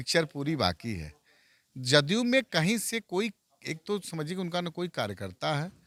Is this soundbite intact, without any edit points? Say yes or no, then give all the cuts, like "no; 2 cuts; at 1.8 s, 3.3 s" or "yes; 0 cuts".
yes; 0 cuts